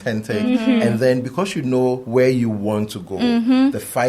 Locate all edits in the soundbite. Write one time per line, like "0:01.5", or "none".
0:02.0